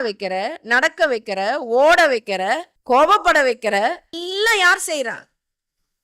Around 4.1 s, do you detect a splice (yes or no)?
yes